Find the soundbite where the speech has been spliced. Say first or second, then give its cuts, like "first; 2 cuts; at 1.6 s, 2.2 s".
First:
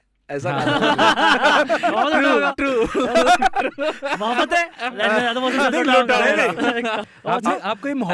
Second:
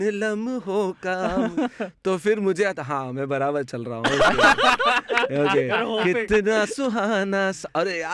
first; 1 cut; at 7.0 s